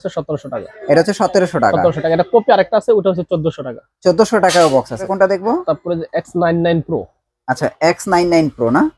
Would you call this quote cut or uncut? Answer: uncut